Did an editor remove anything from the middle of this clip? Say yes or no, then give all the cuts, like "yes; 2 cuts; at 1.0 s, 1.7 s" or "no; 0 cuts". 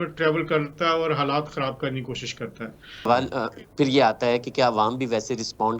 yes; 1 cut; at 3.1 s